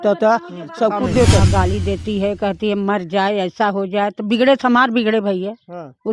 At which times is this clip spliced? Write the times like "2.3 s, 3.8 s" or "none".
1.4 s